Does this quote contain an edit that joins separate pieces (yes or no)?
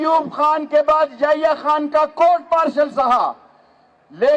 no